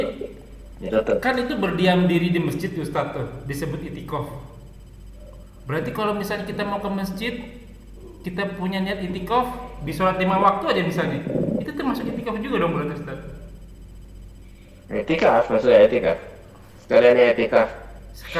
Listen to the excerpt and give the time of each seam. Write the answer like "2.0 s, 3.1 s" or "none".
none